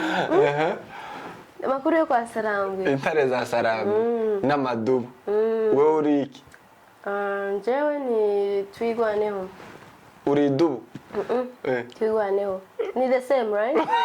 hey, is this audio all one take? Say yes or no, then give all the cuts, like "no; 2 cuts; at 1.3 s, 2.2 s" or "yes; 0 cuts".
yes; 0 cuts